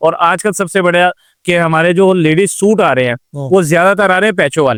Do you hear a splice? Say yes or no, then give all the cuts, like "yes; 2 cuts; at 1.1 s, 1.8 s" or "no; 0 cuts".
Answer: no; 0 cuts